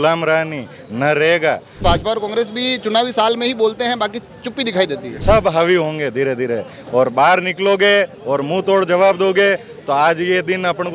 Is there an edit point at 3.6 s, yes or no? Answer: no